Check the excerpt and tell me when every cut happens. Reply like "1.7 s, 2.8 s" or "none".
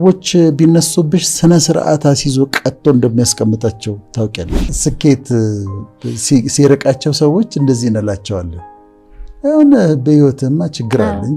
4.7 s

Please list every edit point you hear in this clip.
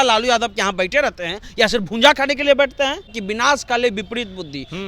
3.1 s

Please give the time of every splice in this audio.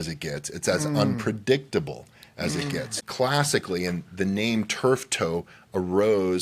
2.9 s

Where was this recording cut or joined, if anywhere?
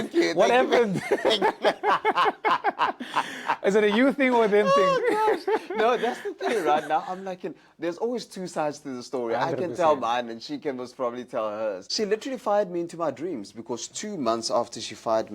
11.9 s

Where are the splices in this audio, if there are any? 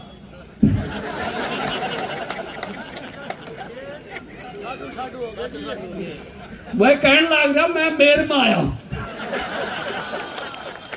none

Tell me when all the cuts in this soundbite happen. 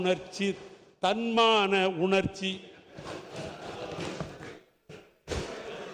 none

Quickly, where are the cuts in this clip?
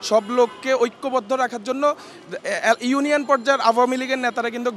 none

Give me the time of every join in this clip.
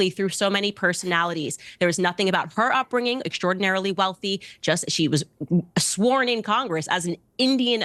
none

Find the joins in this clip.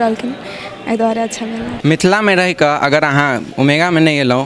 1.7 s

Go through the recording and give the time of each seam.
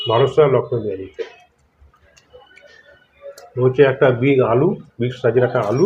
none

